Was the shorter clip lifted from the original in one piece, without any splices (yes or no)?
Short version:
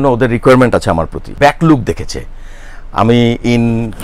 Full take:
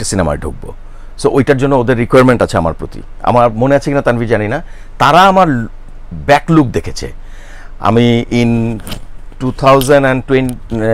no